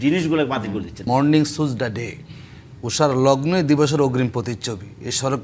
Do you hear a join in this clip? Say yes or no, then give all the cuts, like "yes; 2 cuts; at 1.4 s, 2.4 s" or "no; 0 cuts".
yes; 1 cut; at 1.1 s